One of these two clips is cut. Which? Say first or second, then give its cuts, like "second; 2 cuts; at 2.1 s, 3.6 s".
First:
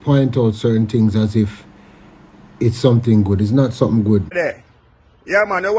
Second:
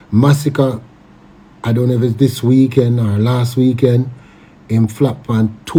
first; 1 cut; at 4.3 s